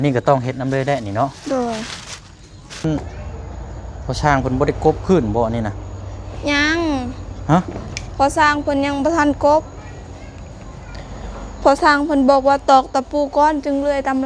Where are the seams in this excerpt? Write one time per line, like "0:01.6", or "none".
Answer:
0:02.8